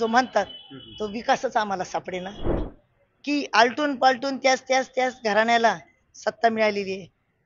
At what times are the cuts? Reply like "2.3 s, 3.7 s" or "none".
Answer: 2.6 s